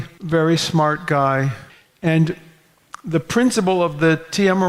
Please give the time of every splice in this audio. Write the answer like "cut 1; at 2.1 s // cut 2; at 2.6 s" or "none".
none

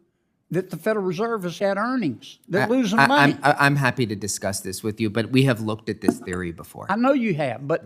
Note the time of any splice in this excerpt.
none

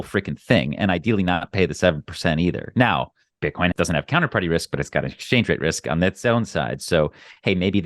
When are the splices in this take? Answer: cut 1; at 3.7 s

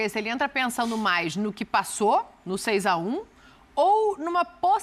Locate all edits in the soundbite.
none

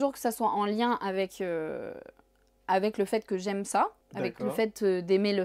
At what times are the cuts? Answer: cut 1; at 4.0 s

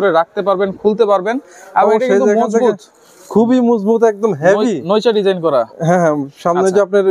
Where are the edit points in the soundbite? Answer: none

